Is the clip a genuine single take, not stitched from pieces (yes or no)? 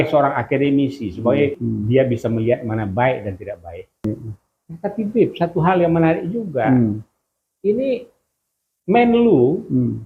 no